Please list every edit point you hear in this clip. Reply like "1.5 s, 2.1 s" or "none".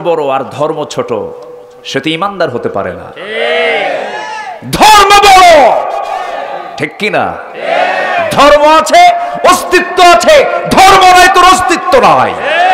none